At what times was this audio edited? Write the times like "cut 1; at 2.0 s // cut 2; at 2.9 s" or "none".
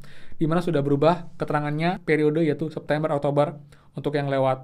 cut 1; at 2.0 s